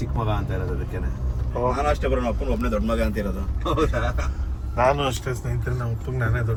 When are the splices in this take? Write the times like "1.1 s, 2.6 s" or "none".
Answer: none